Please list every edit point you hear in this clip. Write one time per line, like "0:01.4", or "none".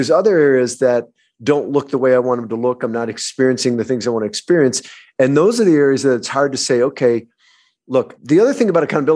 0:08.1